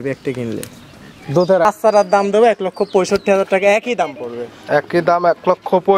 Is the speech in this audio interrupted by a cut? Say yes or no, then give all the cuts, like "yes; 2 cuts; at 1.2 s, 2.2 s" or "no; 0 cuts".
yes; 1 cut; at 1.6 s